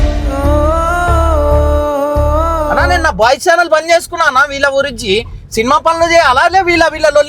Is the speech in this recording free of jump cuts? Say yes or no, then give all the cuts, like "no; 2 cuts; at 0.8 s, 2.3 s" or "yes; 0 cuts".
no; 1 cut; at 2.7 s